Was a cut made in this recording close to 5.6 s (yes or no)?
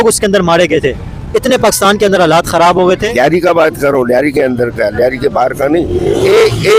no